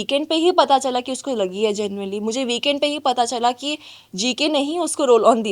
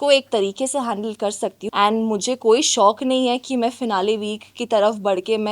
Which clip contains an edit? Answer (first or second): second